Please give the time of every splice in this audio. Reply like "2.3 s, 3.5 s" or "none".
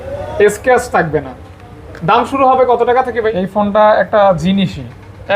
3.2 s